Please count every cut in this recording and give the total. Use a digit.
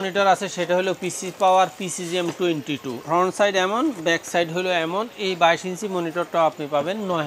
1